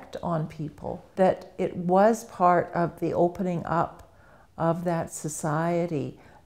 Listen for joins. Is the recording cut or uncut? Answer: cut